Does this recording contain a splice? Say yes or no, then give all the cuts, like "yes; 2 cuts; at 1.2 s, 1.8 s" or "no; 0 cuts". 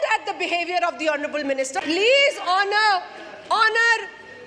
yes; 1 cut; at 1.8 s